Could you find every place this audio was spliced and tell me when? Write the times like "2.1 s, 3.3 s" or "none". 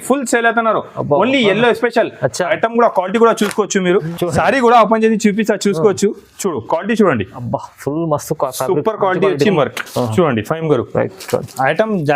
4.1 s, 9.5 s